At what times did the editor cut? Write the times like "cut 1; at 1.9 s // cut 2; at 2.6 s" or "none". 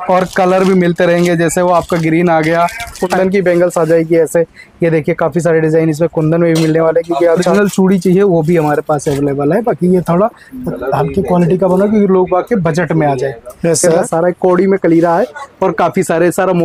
cut 1; at 3.1 s // cut 2; at 7.5 s // cut 3; at 14.0 s